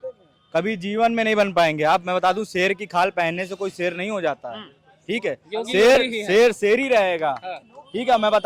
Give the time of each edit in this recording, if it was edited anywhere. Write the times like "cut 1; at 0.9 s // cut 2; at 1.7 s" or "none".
none